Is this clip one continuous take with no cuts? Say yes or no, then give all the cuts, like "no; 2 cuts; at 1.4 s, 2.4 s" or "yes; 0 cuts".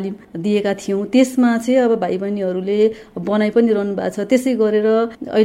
yes; 0 cuts